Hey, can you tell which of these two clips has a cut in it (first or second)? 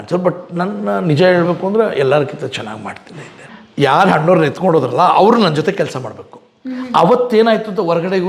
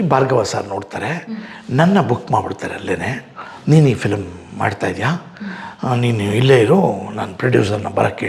first